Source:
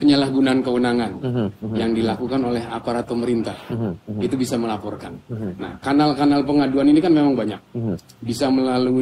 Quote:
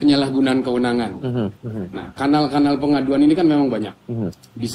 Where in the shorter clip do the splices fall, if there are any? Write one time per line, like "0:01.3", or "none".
0:01.6

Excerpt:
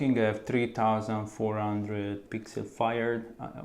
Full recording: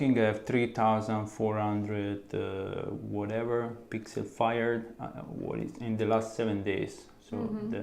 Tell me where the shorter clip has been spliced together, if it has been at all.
0:02.2

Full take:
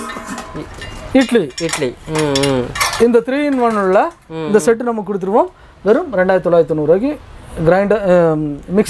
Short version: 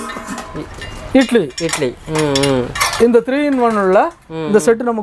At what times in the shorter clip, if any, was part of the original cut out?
none

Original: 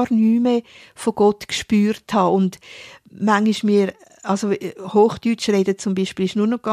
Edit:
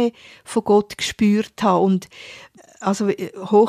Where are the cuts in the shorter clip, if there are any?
0:02.6

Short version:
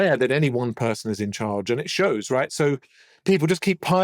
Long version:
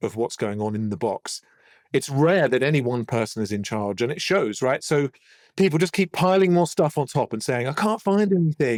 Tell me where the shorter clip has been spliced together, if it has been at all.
none

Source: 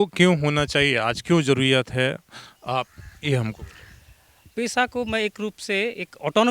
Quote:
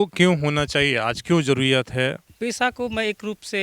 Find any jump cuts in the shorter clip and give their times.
0:02.3

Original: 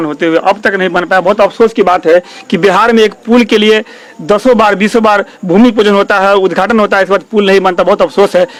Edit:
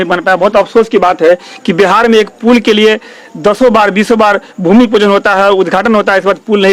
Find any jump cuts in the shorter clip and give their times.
none

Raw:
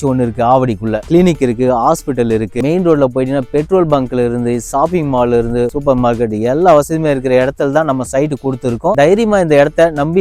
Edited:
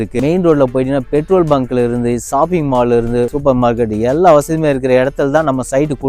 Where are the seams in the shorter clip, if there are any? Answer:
none

